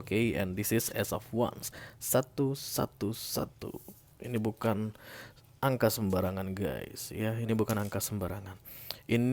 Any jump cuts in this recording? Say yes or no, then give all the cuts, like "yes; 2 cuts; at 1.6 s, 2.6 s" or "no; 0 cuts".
no; 0 cuts